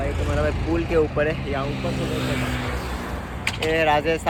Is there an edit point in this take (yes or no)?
no